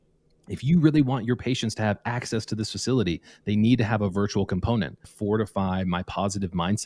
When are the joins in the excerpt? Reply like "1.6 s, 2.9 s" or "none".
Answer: 5.1 s